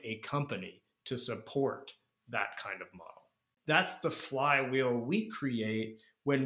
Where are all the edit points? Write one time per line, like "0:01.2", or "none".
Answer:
0:03.5